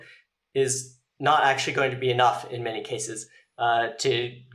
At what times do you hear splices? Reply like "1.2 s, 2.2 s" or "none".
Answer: none